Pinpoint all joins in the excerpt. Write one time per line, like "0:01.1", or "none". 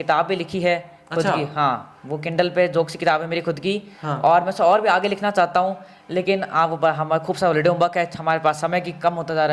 none